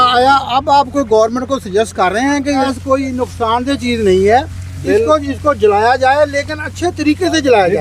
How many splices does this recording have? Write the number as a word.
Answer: one